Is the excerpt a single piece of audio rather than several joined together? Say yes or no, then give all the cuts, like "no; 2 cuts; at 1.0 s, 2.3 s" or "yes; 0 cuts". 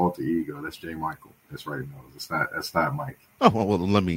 no; 1 cut; at 3.2 s